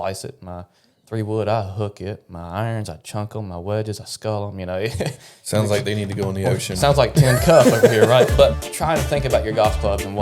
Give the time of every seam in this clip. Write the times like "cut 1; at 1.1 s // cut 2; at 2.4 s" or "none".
cut 1; at 8.6 s